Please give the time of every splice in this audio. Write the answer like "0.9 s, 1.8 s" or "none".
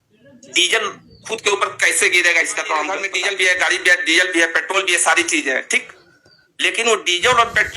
3.1 s